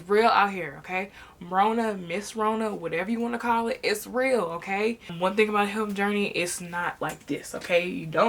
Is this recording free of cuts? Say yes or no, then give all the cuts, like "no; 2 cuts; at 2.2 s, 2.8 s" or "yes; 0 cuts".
no; 1 cut; at 5.1 s